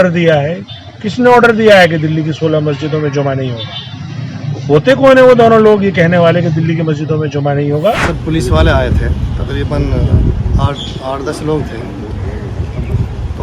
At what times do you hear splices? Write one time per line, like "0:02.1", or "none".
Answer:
0:08.1